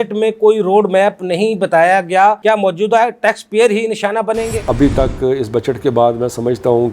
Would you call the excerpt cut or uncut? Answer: cut